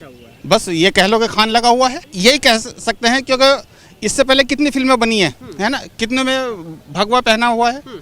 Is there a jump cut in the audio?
yes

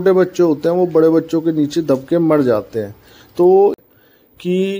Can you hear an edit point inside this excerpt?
yes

